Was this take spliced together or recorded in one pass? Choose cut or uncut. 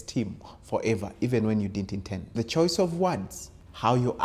cut